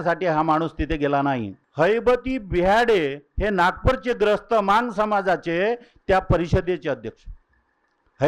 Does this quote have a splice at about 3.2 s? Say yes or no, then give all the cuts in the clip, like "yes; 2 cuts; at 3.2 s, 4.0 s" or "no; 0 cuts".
no; 1 cut; at 1.6 s